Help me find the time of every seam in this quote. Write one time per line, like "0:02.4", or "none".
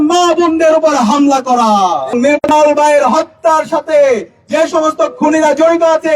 0:02.1